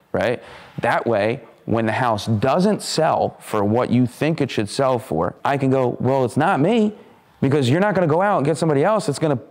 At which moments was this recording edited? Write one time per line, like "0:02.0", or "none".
0:05.3

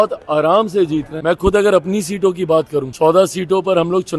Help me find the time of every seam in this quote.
0:01.1
0:02.9

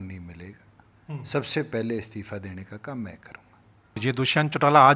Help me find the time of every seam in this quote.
0:03.9

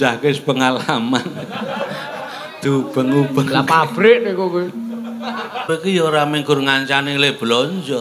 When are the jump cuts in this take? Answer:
0:05.7

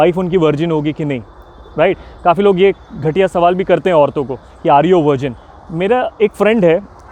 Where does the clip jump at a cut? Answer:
none

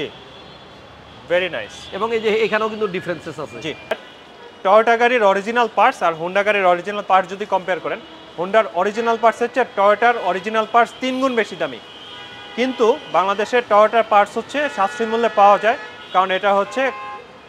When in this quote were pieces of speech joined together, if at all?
0:04.1

